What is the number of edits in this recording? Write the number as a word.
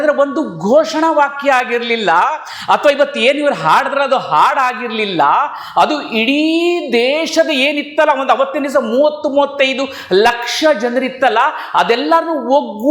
zero